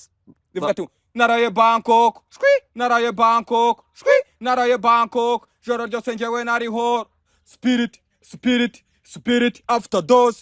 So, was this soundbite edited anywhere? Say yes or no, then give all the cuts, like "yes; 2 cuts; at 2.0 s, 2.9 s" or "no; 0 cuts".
no; 0 cuts